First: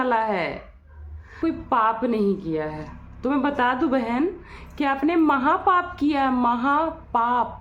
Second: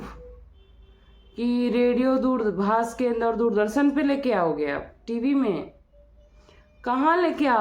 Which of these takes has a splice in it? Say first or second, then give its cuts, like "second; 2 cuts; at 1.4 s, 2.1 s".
first; 1 cut; at 1.4 s